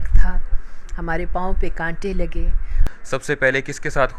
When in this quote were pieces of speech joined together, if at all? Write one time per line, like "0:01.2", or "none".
0:02.9